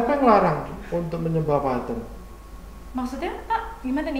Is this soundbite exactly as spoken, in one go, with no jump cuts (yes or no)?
yes